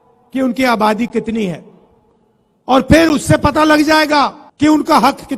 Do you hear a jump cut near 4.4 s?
yes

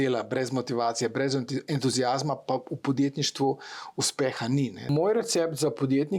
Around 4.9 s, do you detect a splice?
yes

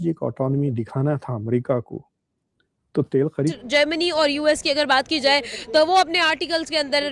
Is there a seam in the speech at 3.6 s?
yes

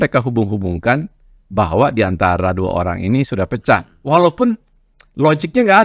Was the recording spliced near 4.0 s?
no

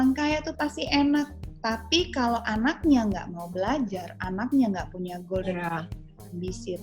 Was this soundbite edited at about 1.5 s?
yes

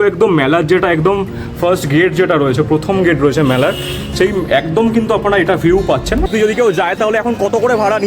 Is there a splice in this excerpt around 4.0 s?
no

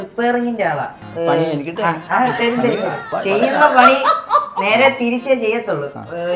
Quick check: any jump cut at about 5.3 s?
no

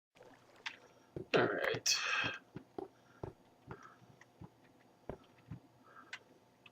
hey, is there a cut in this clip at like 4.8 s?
no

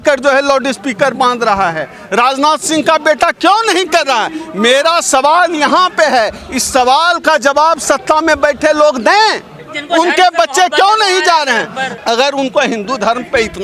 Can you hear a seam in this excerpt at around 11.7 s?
no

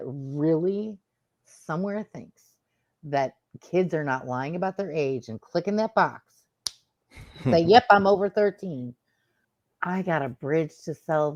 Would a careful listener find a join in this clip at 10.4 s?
no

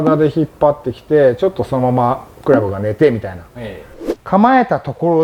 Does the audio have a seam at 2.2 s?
no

